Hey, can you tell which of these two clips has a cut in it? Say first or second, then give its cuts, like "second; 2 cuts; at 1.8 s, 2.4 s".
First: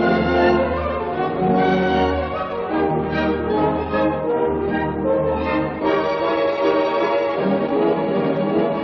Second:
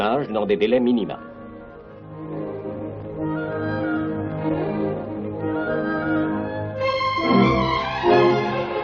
first; 1 cut; at 5.0 s